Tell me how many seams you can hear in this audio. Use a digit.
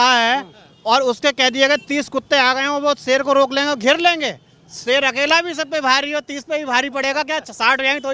0